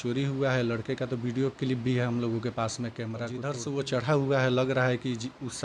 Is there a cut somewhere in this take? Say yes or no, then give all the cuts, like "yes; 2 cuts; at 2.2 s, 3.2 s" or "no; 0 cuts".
yes; 1 cut; at 3.3 s